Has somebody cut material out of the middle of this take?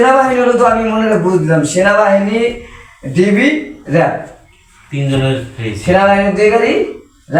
no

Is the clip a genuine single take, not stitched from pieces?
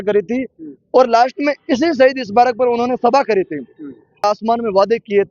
no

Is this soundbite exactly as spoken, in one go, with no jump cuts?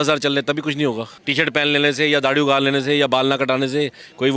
no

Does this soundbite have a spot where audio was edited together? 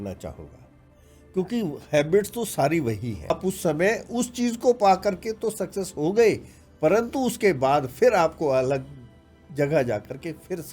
yes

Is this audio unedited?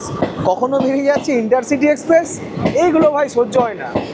yes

